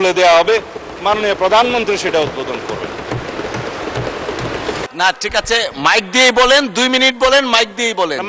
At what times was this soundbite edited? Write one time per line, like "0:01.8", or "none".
0:04.9